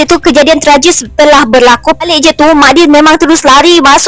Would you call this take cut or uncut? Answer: cut